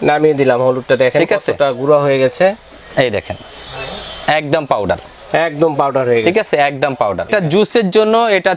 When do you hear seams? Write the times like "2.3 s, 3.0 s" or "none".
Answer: 7.3 s